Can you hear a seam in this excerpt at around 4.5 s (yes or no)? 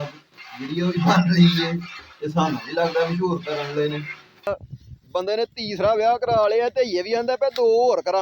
yes